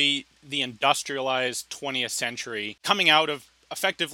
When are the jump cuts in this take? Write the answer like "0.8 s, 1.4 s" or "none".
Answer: 2.7 s